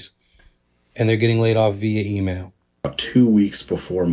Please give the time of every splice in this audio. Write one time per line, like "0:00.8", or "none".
0:02.9